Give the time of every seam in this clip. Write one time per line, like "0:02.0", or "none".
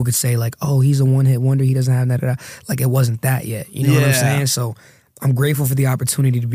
none